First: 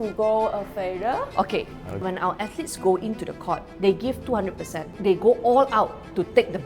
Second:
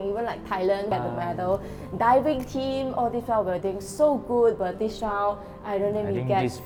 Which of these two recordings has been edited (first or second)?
first